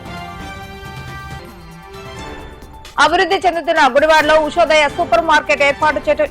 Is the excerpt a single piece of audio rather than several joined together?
no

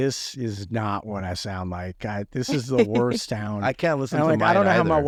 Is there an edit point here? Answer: no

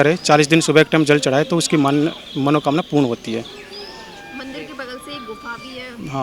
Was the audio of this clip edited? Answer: no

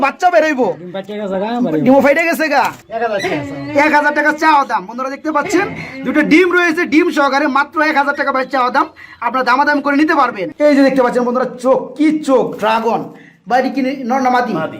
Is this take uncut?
no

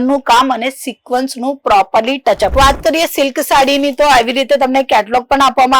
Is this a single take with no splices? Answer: no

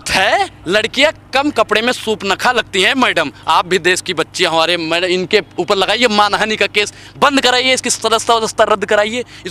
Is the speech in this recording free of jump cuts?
yes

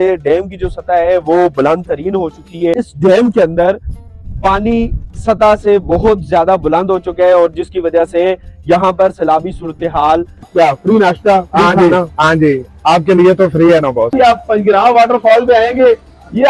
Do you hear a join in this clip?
yes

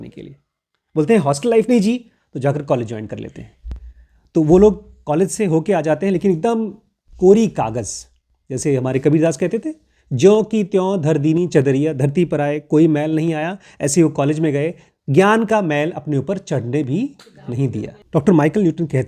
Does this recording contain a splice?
yes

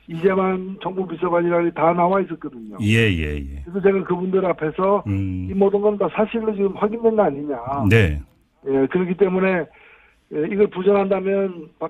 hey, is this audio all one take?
yes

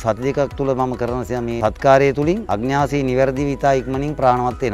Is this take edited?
yes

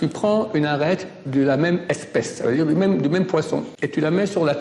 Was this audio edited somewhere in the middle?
yes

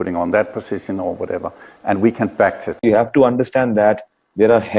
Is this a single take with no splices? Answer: no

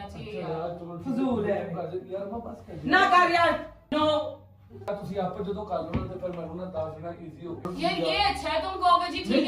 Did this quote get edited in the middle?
yes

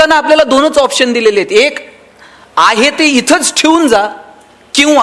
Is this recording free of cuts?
yes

